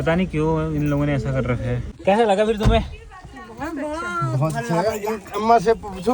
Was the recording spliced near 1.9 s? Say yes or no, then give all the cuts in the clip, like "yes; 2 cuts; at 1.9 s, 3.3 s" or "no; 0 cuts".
yes; 1 cut; at 1.9 s